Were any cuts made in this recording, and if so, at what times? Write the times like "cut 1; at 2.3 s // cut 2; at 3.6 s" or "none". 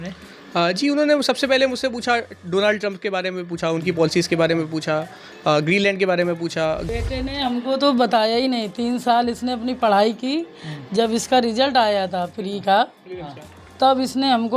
cut 1; at 6.9 s